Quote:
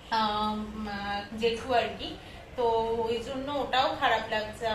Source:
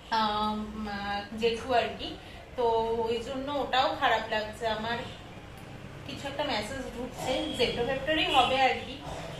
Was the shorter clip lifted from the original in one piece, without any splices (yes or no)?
yes